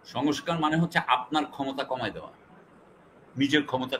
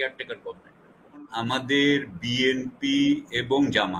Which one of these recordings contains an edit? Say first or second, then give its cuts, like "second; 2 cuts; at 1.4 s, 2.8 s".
second; 1 cut; at 1.3 s